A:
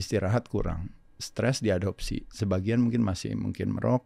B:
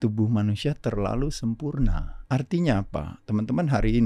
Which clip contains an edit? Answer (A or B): B